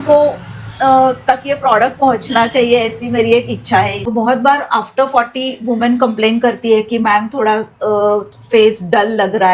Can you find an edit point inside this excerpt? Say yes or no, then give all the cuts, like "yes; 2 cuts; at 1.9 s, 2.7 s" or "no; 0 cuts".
yes; 1 cut; at 4.1 s